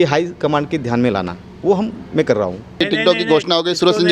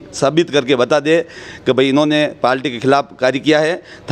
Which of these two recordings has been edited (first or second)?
first